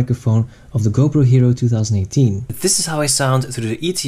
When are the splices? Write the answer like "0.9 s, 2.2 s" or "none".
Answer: 2.5 s